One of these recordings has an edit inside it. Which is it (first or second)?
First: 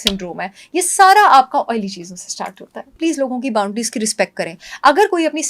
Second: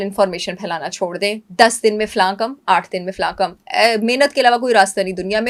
first